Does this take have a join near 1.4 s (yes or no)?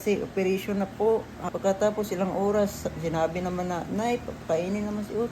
yes